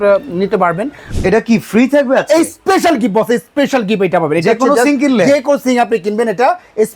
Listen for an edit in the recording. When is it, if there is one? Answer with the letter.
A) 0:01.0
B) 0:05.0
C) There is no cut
A